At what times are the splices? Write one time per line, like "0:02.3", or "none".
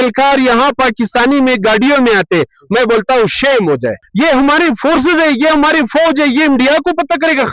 0:04.0